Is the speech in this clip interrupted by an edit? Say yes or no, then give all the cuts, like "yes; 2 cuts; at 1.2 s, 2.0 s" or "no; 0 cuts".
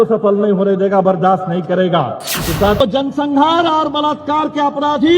yes; 1 cut; at 2.8 s